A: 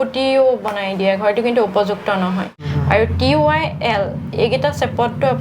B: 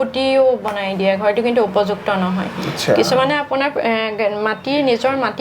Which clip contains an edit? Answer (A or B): A